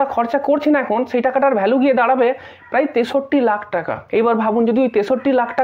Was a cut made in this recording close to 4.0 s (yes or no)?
yes